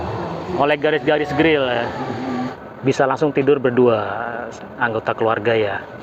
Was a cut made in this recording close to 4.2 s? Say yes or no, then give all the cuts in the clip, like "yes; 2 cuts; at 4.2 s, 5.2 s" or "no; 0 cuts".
no; 1 cut; at 2.6 s